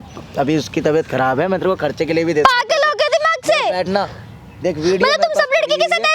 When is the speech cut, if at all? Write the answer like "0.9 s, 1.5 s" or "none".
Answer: none